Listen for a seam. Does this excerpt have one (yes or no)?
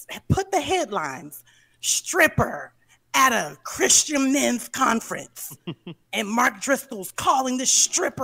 no